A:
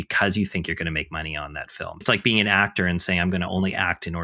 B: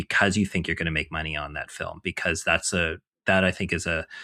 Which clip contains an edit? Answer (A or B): A